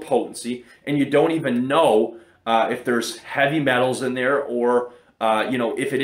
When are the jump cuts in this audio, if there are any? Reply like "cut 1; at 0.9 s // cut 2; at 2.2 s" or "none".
none